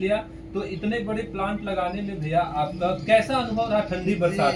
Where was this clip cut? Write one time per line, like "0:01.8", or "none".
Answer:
none